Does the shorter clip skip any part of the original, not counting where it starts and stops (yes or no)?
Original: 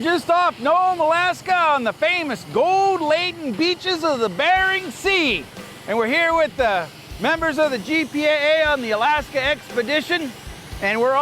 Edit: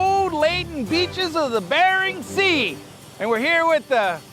no